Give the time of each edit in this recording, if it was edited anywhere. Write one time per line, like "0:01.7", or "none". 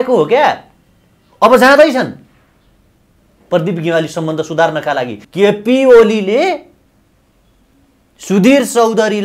0:05.2